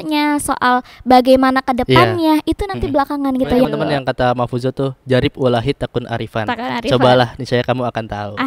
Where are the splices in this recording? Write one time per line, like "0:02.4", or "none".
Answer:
0:03.7